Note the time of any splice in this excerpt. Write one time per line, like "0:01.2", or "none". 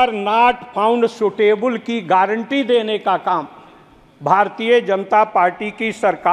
none